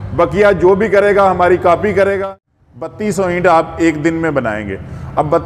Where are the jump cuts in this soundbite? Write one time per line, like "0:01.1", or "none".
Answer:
0:02.2